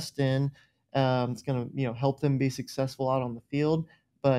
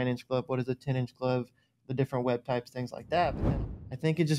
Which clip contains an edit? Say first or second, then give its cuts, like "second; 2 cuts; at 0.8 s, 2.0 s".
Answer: second; 1 cut; at 3.4 s